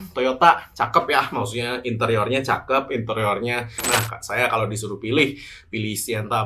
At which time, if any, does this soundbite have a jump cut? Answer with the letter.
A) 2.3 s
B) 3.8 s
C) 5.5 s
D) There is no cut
B